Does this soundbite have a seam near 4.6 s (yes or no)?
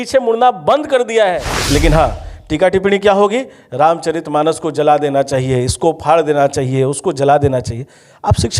no